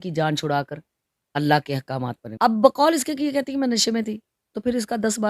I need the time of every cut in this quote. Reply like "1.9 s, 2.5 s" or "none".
2.2 s